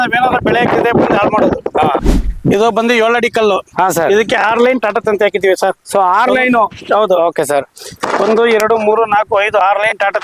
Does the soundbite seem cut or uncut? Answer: cut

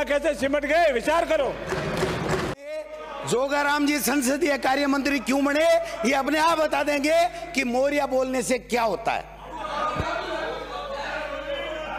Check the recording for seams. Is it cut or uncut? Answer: uncut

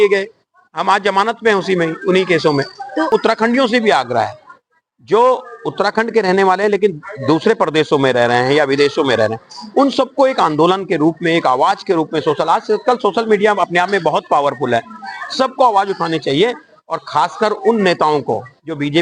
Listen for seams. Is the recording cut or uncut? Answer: cut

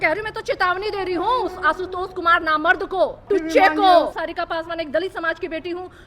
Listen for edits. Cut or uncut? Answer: cut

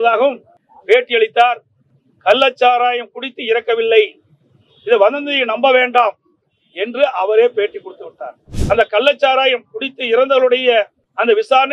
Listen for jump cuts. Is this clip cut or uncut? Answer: cut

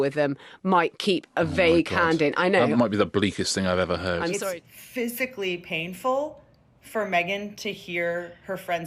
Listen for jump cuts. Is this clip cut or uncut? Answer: cut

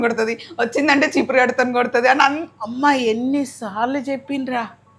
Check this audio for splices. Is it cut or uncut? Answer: uncut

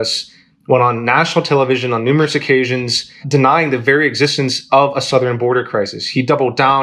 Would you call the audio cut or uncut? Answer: uncut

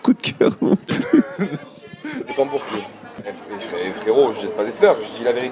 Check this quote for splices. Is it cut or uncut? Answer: cut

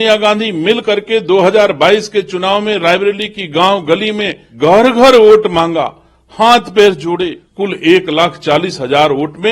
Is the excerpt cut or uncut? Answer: cut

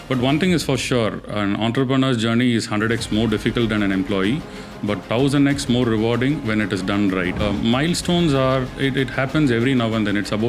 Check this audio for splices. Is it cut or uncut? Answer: cut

